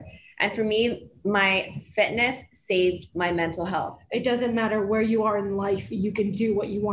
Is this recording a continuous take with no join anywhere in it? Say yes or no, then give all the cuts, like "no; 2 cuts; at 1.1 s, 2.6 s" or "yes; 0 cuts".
no; 1 cut; at 4.0 s